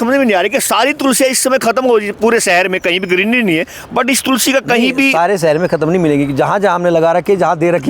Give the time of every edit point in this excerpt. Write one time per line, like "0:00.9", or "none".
none